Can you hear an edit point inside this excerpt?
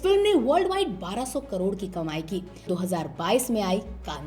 yes; 1 cut; at 2.7 s

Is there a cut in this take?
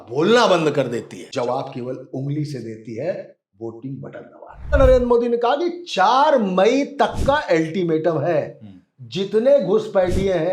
yes; 2 cuts; at 1.3 s, 4.7 s

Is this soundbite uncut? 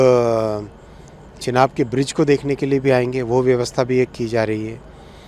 yes; 0 cuts

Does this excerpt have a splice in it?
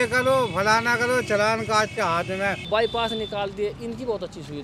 yes; 1 cut; at 2.6 s

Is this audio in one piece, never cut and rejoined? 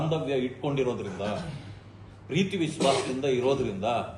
yes; 0 cuts

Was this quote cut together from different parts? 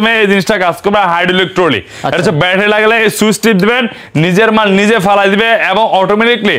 no; 0 cuts

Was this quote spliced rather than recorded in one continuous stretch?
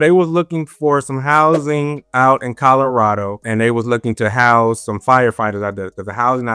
no; 0 cuts

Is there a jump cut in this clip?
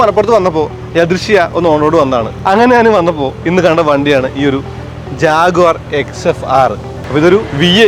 yes; 2 cuts; at 2.3 s, 7.0 s

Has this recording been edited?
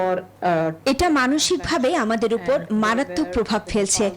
no; 0 cuts

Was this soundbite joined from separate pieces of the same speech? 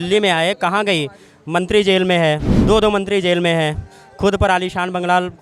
yes; 1 cut; at 2.5 s

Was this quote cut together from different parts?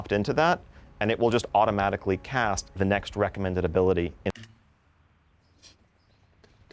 no; 0 cuts

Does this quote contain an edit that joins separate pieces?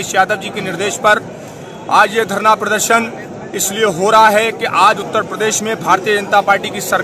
no; 0 cuts

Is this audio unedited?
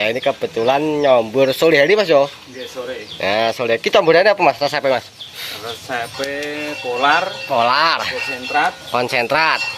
yes; 0 cuts

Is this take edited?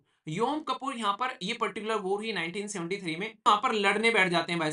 yes; 1 cut; at 3.4 s

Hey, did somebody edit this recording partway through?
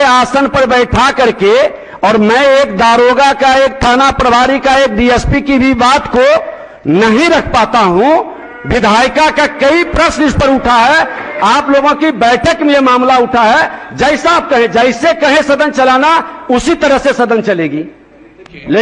no; 0 cuts

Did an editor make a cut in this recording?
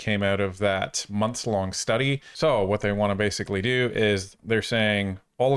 yes; 1 cut; at 2.3 s

